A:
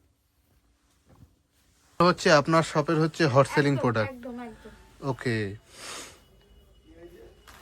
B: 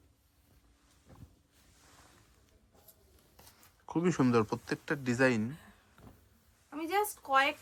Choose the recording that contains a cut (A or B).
A